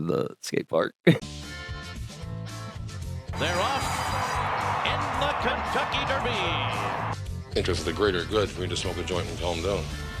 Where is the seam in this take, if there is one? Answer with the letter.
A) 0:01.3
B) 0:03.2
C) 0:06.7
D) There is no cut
A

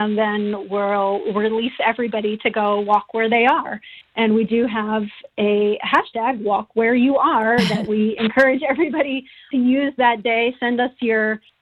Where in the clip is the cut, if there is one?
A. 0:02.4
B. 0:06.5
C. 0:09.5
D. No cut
C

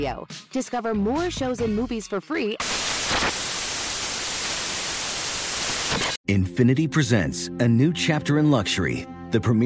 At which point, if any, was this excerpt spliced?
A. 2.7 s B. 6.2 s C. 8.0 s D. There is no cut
B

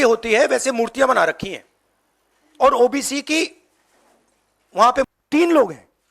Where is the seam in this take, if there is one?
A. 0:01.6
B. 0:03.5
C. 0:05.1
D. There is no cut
C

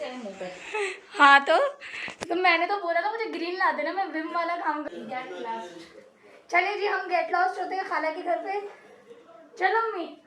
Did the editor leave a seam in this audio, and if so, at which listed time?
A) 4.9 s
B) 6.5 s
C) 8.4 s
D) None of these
A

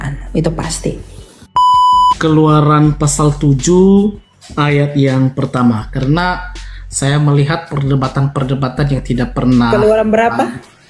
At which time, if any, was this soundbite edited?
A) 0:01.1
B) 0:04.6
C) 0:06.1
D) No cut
D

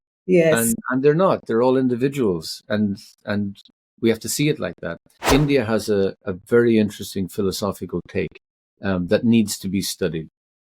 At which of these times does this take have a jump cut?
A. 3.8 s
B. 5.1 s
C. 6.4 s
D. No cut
B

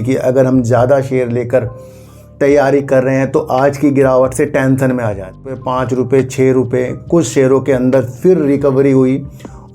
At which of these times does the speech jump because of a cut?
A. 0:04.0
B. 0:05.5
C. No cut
B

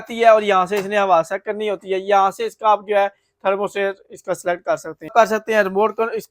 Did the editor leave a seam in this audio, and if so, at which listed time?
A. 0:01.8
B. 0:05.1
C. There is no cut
B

